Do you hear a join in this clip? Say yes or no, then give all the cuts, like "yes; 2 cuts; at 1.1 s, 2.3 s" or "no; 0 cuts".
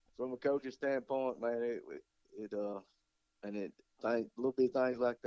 no; 0 cuts